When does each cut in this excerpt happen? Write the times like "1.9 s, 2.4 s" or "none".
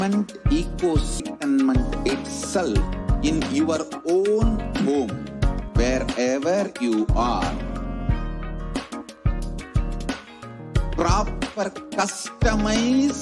1.2 s